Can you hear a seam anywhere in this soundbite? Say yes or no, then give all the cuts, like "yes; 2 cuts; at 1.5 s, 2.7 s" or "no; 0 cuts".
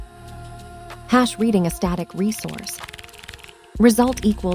yes; 1 cut; at 1.1 s